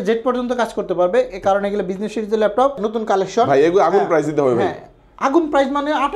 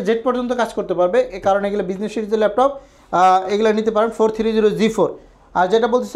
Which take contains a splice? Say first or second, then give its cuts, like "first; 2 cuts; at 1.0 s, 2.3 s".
first; 1 cut; at 2.8 s